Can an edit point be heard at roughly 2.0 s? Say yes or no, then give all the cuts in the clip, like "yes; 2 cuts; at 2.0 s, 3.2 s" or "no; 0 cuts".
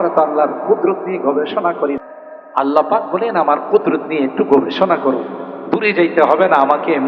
yes; 1 cut; at 2.0 s